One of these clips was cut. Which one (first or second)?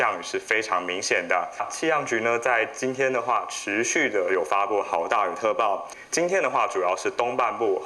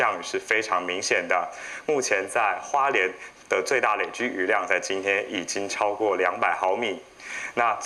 first